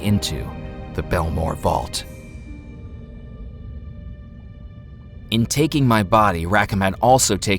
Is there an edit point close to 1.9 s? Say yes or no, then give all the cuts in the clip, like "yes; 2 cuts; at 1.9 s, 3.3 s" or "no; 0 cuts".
yes; 2 cuts; at 1.9 s, 5.2 s